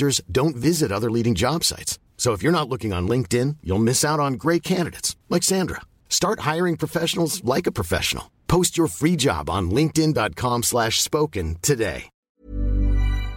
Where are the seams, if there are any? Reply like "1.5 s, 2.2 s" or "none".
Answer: 12.2 s